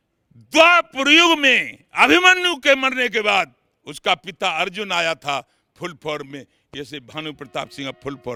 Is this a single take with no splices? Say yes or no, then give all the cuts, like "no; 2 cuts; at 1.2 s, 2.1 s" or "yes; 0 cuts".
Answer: yes; 0 cuts